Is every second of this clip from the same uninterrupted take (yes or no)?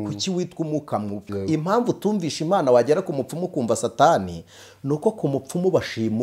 no